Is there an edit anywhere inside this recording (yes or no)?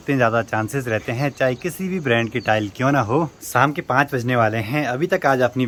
no